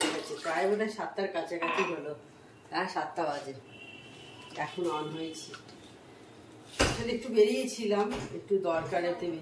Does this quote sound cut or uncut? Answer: uncut